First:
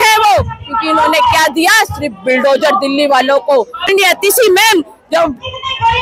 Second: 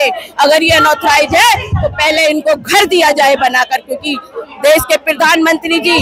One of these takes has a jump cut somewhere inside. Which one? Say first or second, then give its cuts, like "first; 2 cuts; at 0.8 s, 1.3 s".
first; 1 cut; at 3.9 s